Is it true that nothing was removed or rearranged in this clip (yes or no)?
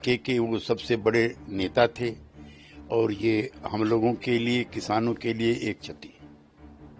no